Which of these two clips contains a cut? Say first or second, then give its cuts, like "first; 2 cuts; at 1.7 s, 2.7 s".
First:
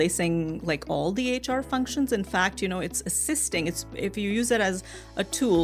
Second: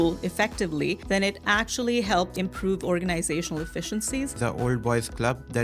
second; 3 cuts; at 1.0 s, 2.3 s, 4.4 s